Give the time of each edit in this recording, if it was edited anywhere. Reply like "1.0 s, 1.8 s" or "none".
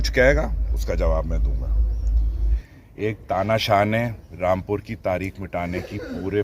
2.5 s